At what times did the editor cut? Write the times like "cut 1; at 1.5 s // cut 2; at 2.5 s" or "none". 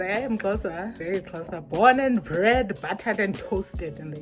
cut 1; at 0.9 s